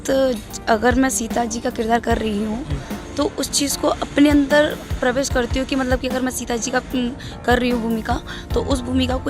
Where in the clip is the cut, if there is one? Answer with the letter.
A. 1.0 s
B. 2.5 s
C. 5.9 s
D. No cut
D